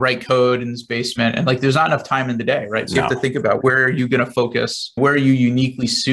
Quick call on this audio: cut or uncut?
cut